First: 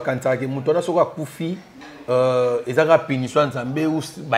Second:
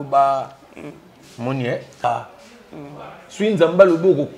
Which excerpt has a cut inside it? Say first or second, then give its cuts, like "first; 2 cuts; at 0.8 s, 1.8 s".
second; 1 cut; at 2.1 s